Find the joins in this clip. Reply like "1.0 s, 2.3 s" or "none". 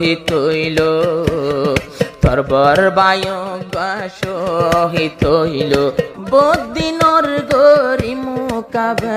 6.2 s